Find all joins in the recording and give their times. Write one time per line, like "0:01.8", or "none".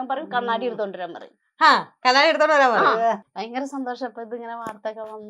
0:03.3